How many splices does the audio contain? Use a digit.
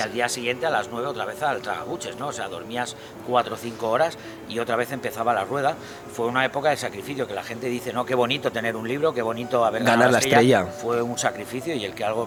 0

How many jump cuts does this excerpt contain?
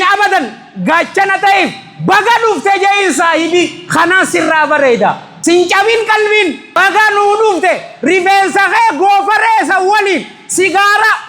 2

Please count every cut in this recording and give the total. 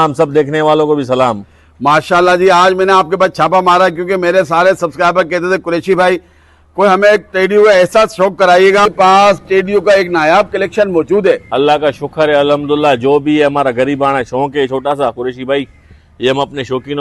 1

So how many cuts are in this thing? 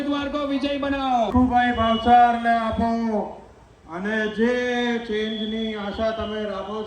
1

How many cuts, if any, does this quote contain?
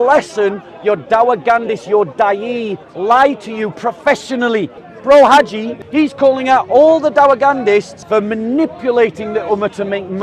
3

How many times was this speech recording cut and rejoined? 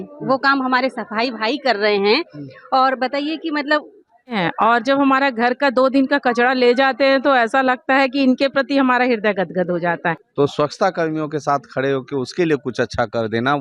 2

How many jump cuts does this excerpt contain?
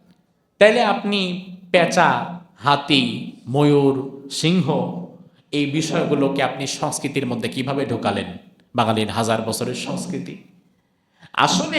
0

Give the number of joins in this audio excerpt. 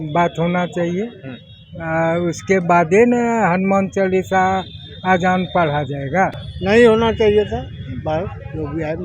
0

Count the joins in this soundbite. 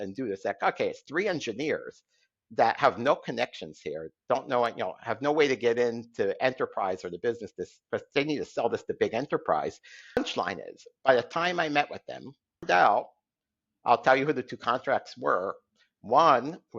2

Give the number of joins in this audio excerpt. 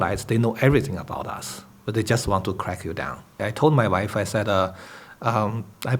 1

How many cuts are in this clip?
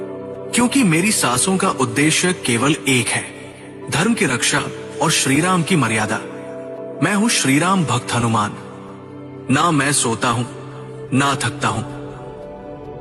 0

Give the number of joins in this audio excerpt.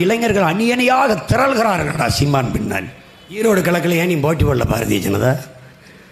1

